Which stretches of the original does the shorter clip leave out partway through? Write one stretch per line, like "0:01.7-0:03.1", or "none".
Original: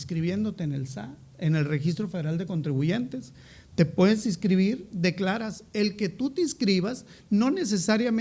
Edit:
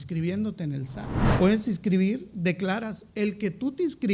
0:01.3-0:03.9